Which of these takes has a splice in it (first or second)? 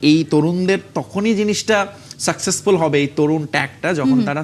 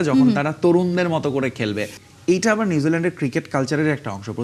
second